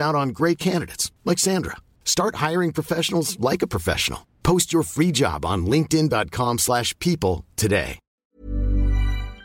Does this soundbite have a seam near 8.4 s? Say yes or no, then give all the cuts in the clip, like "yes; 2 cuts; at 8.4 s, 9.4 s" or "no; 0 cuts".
yes; 1 cut; at 8.4 s